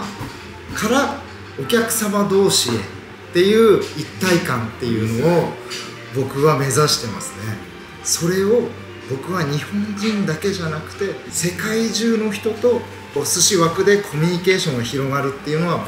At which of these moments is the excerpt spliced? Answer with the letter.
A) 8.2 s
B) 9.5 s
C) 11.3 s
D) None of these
C